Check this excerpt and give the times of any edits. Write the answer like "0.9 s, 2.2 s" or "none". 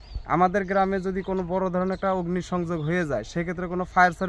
none